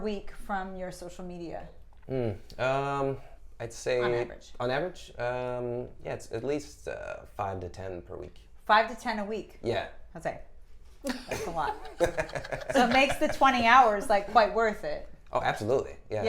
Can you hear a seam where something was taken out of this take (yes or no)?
no